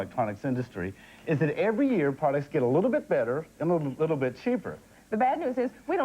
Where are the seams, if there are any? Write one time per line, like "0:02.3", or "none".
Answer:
0:02.8